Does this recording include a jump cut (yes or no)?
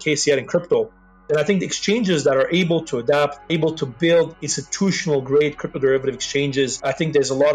yes